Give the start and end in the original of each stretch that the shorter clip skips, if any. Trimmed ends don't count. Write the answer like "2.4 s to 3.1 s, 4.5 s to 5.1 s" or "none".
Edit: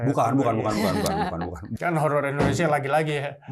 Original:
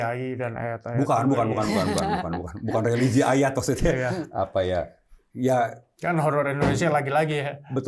2.5 s to 5.8 s